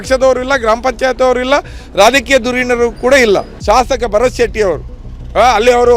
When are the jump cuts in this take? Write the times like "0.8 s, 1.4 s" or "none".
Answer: 3.5 s

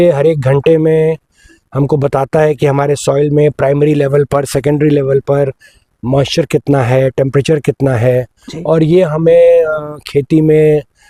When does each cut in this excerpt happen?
none

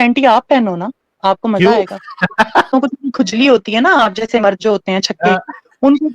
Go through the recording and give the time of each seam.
2.7 s

